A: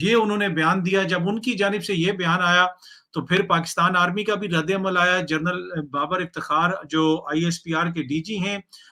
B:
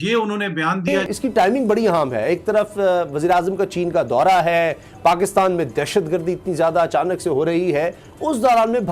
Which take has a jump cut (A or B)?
B